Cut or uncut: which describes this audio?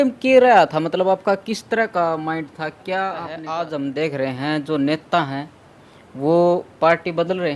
cut